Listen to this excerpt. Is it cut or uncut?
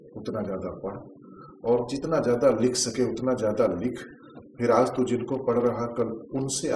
uncut